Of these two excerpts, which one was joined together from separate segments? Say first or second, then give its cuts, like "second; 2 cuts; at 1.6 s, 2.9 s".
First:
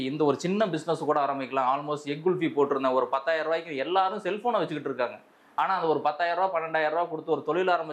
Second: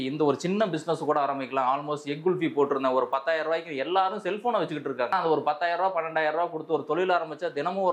second; 1 cut; at 5.1 s